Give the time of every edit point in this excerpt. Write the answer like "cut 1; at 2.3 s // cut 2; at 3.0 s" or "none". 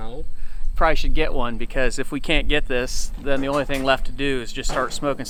none